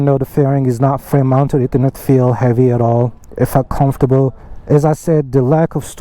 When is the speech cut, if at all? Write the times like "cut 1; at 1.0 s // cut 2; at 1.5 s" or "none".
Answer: cut 1; at 4.5 s